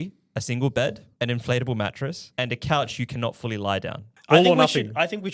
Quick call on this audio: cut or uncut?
cut